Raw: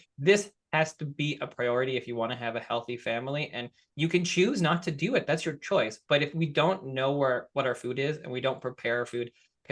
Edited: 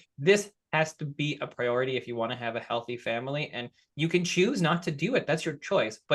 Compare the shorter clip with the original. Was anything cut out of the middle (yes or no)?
no